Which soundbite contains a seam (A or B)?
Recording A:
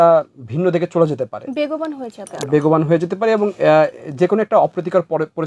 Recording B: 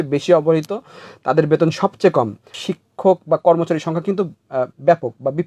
B